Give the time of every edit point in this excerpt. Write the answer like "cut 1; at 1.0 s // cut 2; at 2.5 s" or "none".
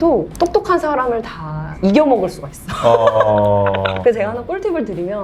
cut 1; at 4.0 s